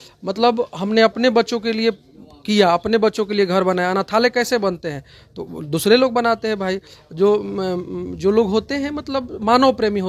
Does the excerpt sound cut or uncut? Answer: uncut